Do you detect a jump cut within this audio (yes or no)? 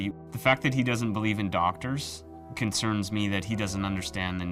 no